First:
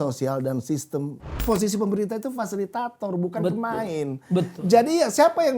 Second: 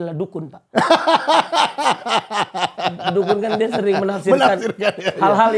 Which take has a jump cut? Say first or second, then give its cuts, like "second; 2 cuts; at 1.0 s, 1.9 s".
first; 1 cut; at 1.2 s